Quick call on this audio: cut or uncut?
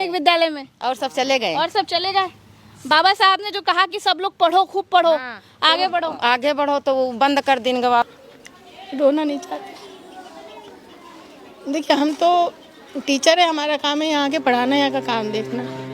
cut